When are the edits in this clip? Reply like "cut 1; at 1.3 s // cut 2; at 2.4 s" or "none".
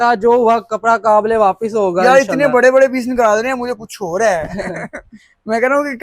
none